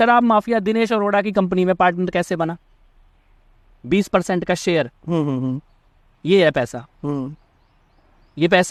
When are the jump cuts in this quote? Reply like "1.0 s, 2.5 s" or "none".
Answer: none